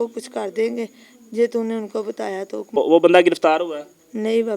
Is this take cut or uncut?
cut